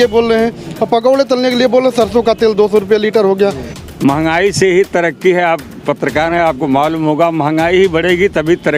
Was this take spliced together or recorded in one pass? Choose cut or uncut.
cut